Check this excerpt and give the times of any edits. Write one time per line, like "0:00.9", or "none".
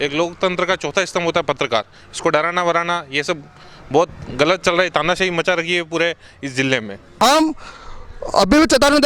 0:07.2